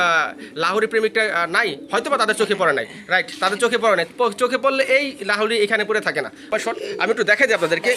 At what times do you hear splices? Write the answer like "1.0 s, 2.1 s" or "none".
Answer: 6.5 s